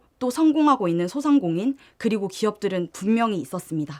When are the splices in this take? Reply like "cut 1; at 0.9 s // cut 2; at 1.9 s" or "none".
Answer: none